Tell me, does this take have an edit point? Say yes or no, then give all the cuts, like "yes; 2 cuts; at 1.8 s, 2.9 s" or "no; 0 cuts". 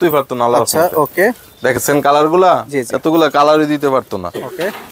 no; 0 cuts